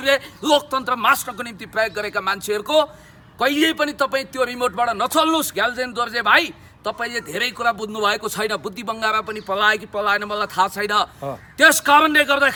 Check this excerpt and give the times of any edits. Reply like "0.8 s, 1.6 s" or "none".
none